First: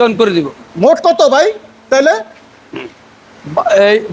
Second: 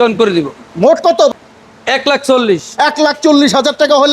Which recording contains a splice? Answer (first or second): second